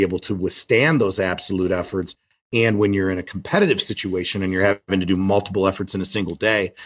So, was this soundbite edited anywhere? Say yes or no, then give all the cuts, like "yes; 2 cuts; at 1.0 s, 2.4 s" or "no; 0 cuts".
yes; 1 cut; at 3.3 s